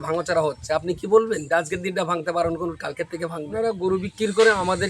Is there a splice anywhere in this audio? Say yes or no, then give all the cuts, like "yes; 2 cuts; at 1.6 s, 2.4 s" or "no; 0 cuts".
yes; 1 cut; at 3.5 s